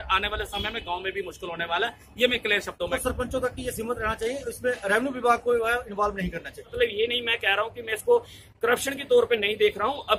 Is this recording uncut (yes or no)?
no